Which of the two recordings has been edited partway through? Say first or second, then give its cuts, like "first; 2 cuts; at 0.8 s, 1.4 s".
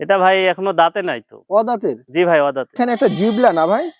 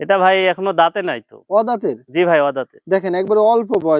first; 1 cut; at 2.8 s